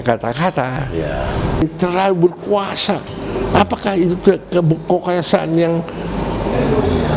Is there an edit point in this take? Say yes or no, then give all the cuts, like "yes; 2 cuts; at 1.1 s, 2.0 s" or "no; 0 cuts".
yes; 1 cut; at 1.6 s